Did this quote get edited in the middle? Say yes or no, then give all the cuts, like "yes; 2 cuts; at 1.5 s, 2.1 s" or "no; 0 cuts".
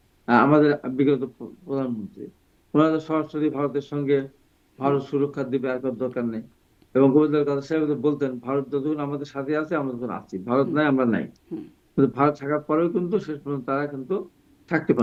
no; 0 cuts